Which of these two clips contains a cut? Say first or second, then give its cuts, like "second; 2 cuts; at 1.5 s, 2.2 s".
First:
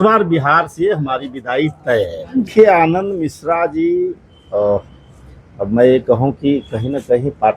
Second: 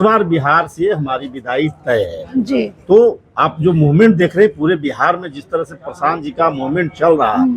first; 1 cut; at 2.5 s